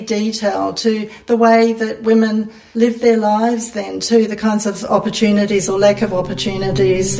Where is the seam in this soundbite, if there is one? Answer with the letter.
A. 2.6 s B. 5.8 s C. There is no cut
A